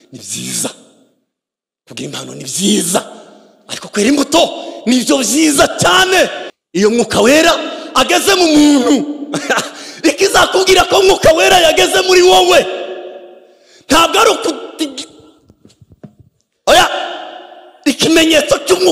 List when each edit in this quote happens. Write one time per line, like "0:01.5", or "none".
0:06.5